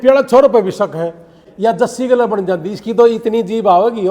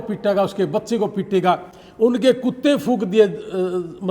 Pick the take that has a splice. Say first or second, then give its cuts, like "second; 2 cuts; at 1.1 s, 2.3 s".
first; 1 cut; at 1.4 s